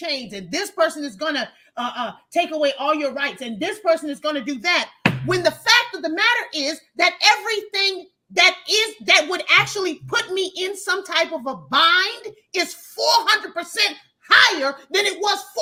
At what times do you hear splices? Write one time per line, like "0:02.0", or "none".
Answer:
none